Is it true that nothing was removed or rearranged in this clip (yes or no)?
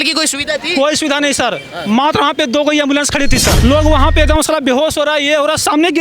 no